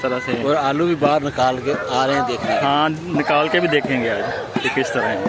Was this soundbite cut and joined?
no; 0 cuts

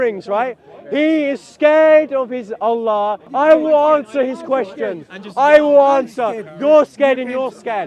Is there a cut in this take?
yes; 1 cut; at 3.2 s

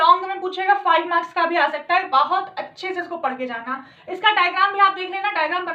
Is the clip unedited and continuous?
yes; 0 cuts

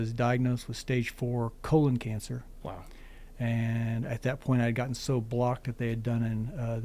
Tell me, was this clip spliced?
no; 0 cuts

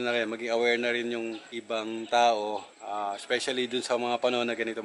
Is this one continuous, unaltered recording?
yes; 0 cuts

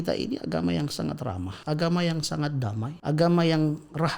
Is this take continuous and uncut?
no; 2 cuts; at 1.5 s, 2.9 s

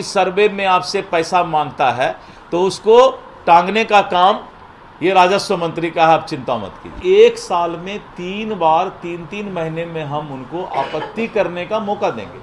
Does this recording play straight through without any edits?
no; 1 cut; at 7.0 s

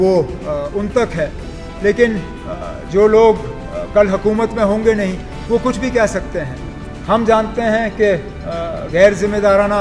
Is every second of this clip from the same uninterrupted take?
yes; 0 cuts

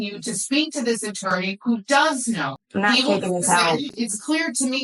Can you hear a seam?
yes; 2 cuts; at 2.6 s, 4.0 s

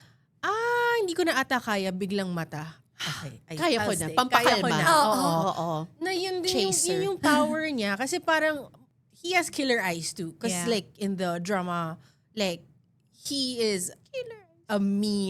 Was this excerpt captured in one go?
yes; 0 cuts

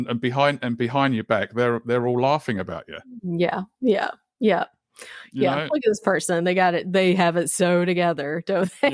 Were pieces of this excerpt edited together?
no; 0 cuts

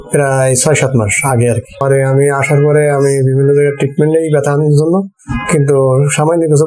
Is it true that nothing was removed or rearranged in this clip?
no; 1 cut; at 1.8 s

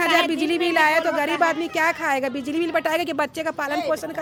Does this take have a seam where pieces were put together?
no; 0 cuts

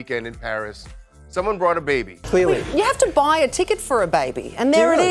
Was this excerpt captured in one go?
yes; 0 cuts

